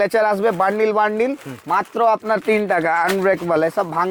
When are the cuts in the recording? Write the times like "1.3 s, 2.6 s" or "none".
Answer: none